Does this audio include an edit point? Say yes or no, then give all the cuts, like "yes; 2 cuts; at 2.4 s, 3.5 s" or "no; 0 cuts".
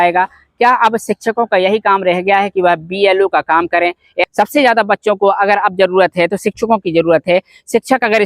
yes; 1 cut; at 4.2 s